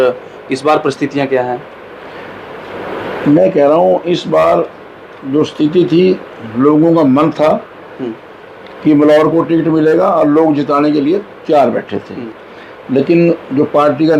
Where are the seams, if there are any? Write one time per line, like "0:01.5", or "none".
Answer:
none